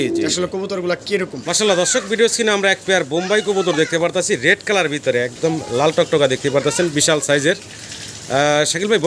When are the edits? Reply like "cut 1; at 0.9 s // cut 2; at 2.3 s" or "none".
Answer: cut 1; at 1.4 s

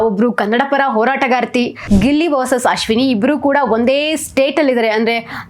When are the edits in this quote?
cut 1; at 1.8 s

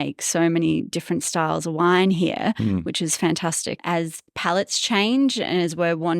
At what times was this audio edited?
cut 1; at 3.8 s

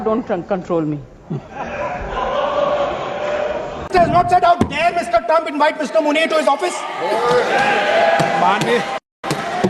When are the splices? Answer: none

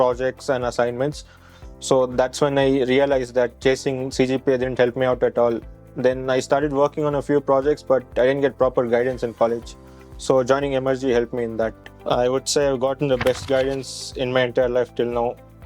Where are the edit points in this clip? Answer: cut 1; at 1.4 s // cut 2; at 11.9 s

